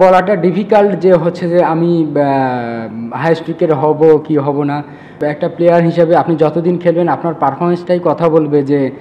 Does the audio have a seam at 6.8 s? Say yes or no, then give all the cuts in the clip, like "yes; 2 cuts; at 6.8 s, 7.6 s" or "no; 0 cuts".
no; 1 cut; at 5.2 s